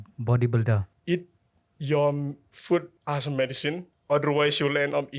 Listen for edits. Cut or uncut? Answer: cut